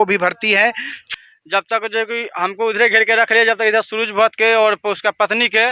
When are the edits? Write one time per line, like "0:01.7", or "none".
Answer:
0:01.1